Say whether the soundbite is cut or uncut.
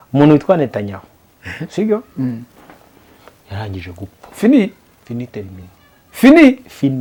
uncut